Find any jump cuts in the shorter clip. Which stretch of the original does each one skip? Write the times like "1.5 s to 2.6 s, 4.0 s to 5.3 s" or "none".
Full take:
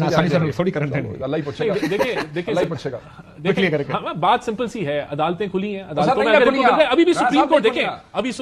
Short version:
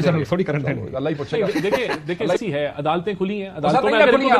2.7 s to 4.8 s